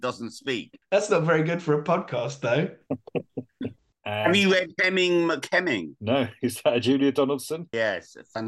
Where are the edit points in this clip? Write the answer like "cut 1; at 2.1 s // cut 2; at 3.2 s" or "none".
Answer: cut 1; at 3.9 s // cut 2; at 5.9 s // cut 3; at 7.7 s